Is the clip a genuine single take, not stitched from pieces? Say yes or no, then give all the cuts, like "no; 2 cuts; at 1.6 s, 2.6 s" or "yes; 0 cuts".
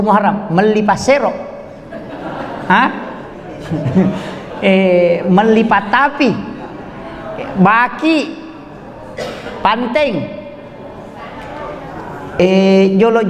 yes; 0 cuts